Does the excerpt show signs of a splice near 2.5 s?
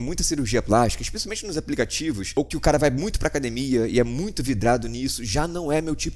yes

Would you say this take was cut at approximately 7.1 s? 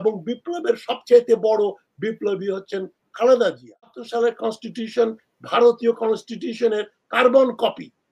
no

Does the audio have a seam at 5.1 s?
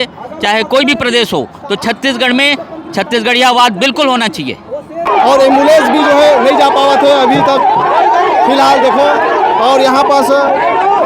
yes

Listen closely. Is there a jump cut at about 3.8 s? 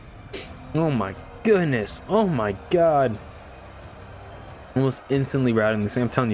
no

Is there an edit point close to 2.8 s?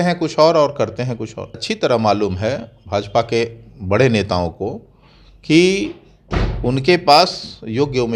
no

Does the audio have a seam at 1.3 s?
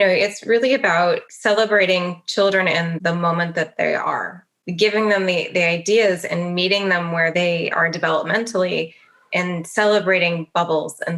yes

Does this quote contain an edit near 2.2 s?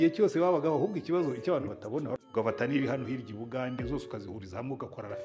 yes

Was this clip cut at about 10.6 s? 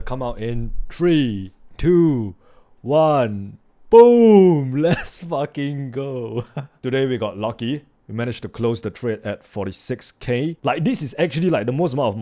yes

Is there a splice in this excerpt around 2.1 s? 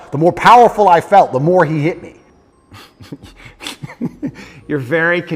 yes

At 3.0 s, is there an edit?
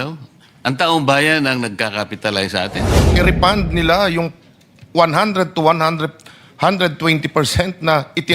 yes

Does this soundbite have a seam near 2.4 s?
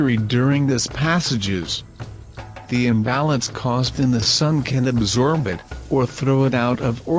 no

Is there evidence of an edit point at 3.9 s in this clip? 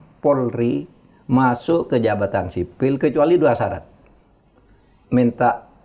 no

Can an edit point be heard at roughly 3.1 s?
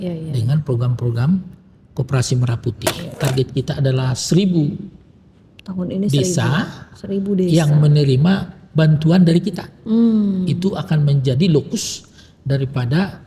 yes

